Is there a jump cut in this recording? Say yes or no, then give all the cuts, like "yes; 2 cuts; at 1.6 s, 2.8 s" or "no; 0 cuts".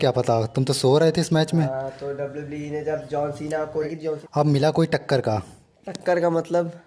yes; 1 cut; at 3.9 s